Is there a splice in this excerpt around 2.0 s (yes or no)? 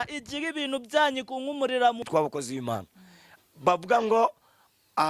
yes